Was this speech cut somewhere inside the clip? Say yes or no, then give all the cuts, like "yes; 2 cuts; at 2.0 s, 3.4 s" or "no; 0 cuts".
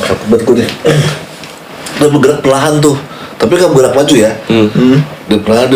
no; 0 cuts